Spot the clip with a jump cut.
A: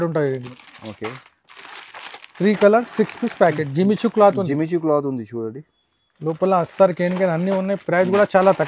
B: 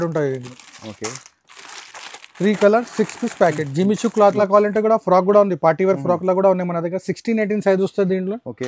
B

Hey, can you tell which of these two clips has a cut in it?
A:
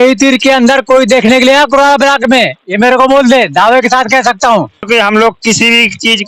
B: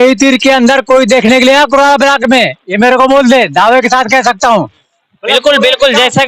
A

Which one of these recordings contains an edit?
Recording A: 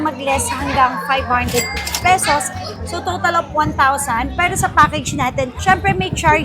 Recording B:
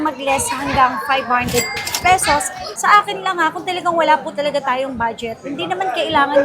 B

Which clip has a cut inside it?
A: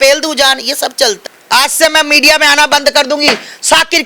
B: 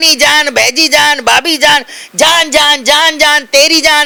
A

